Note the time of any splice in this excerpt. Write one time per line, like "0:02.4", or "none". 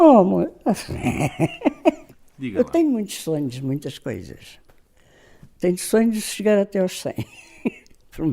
0:02.0